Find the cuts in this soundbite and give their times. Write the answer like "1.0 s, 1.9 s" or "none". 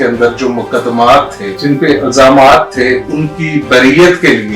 1.5 s